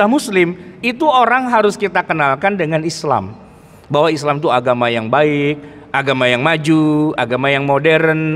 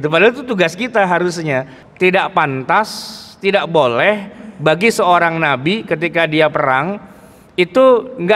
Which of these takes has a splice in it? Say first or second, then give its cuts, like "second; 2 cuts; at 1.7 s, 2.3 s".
second; 1 cut; at 1.8 s